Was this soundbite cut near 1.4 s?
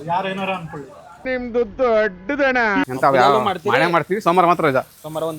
no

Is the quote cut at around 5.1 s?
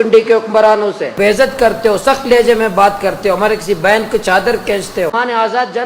yes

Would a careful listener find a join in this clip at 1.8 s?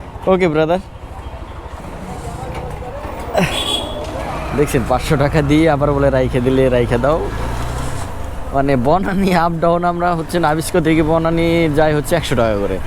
yes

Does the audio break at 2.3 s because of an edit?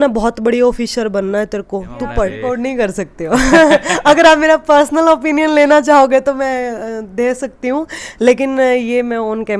yes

